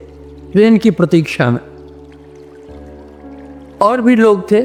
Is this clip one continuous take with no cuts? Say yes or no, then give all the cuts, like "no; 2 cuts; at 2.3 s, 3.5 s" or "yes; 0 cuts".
yes; 0 cuts